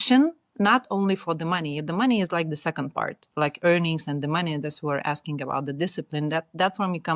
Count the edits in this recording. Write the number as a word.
zero